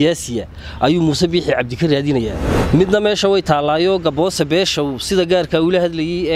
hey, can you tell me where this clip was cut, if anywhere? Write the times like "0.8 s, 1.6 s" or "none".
2.5 s